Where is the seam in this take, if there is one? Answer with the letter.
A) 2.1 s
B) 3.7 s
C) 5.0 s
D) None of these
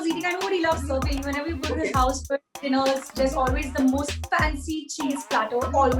D